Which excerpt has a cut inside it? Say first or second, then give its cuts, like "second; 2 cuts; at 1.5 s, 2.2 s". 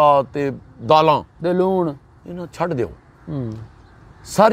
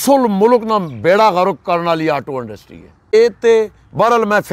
second; 1 cut; at 3.1 s